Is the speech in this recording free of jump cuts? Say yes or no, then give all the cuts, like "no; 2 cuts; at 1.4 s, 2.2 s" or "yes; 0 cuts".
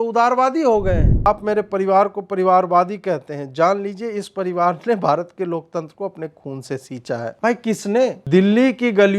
no; 3 cuts; at 1.3 s, 7.3 s, 8.2 s